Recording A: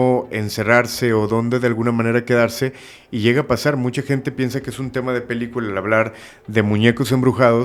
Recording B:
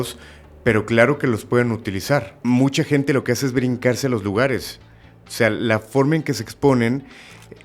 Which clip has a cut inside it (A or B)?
B